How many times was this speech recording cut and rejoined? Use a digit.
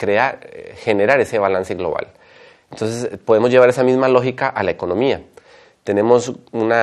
0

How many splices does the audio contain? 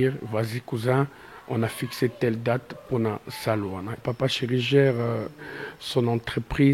1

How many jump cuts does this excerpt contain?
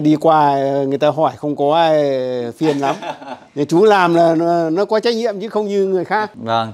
0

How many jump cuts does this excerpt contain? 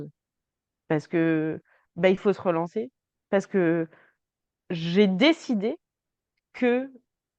0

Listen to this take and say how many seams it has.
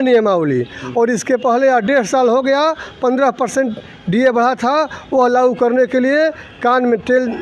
0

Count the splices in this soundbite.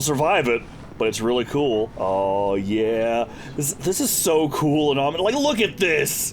1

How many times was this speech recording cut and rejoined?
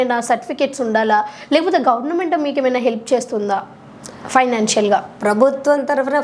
0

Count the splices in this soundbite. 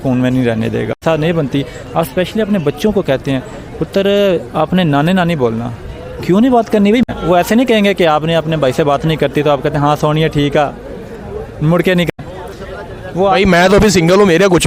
3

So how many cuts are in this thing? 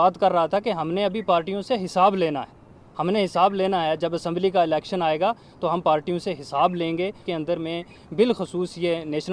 1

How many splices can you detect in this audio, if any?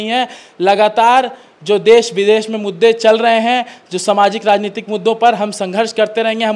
0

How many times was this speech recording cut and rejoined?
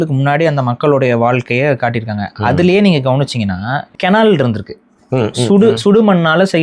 1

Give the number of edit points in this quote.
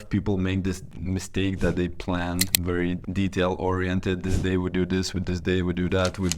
2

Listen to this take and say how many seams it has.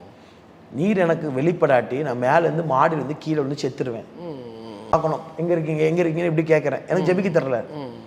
1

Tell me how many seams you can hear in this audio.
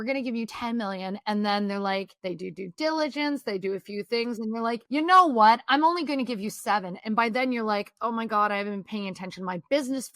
2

